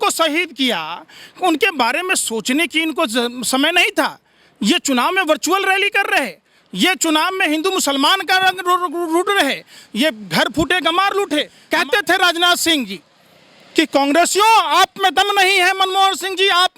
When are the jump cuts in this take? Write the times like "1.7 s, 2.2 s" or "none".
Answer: 11.6 s